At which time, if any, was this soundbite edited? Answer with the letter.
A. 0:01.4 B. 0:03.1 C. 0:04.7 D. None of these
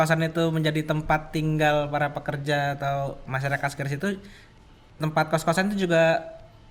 D